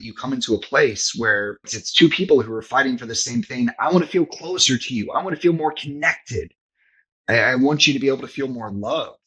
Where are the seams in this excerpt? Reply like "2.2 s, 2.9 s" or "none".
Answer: 1.7 s